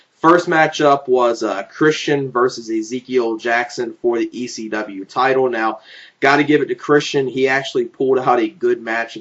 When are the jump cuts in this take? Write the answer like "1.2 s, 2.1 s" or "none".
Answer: 3.6 s